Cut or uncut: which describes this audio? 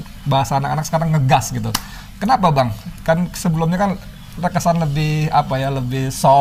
uncut